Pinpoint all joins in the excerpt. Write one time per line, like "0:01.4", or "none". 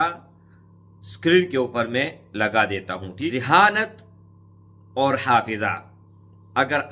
0:03.3